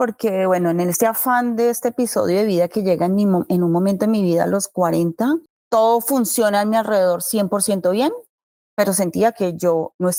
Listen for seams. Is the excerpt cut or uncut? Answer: uncut